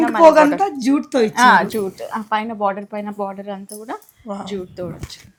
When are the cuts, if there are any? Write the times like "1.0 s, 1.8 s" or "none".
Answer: none